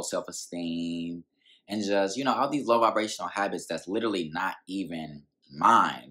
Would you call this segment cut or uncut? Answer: uncut